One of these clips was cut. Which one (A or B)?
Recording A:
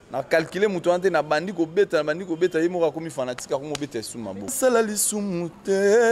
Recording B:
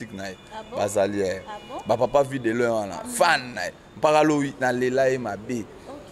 A